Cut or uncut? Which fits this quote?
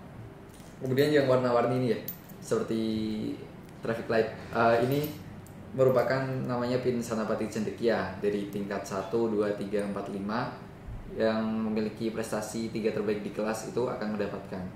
uncut